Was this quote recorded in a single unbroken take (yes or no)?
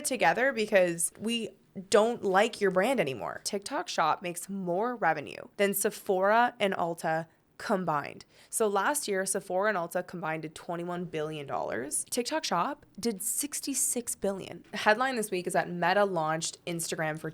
no